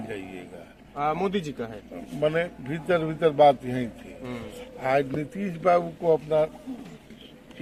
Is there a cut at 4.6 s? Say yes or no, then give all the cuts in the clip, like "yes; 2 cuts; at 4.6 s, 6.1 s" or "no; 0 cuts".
no; 0 cuts